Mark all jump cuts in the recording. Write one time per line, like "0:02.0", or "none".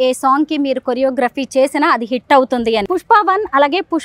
0:02.9